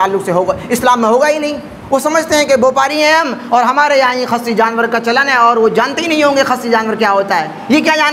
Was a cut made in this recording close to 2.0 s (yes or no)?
no